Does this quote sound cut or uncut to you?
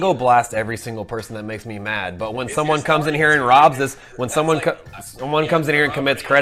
uncut